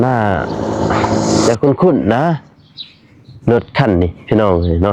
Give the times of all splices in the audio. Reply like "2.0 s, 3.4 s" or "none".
1.5 s